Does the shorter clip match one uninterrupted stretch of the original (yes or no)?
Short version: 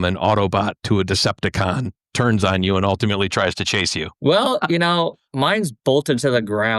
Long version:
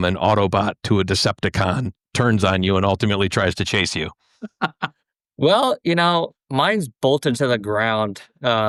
no